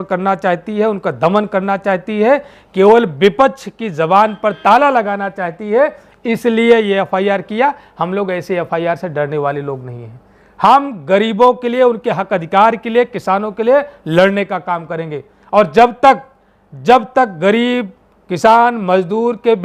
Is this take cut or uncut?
uncut